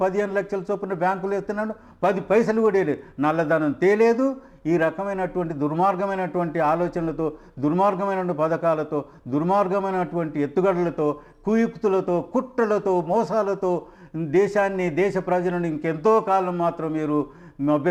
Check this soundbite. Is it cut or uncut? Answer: uncut